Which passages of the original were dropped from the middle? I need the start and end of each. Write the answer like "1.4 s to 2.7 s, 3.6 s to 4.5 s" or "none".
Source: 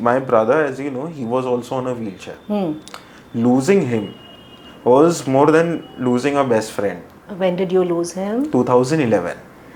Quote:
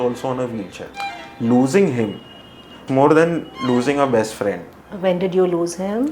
2.4 s to 2.8 s, 4.8 s to 5.2 s